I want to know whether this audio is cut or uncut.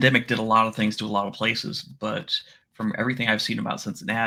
uncut